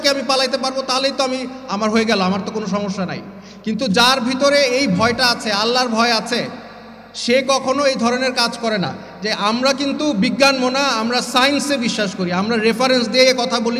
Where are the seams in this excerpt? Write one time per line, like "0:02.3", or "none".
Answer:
0:09.0